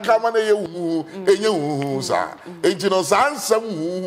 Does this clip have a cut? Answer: no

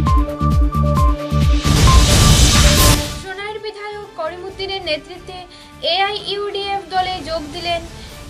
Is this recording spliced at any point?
yes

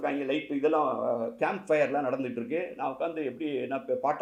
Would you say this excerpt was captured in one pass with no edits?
yes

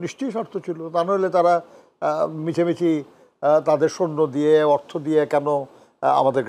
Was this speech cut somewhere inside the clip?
no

